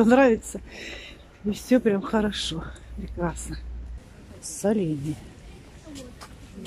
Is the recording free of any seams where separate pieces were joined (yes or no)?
no